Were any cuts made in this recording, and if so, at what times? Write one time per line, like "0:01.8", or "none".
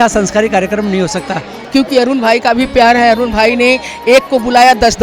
0:01.6